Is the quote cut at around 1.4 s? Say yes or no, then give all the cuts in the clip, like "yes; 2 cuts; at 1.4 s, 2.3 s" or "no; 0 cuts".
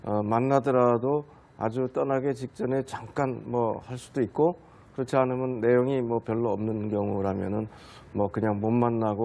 no; 1 cut; at 4.7 s